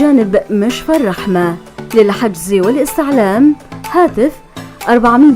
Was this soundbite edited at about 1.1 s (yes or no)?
yes